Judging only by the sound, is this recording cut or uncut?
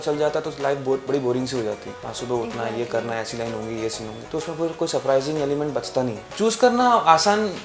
uncut